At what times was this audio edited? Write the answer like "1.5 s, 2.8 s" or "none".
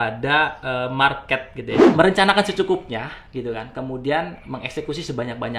1.8 s